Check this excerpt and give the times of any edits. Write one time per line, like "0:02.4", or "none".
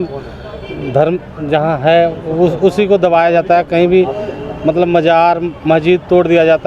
none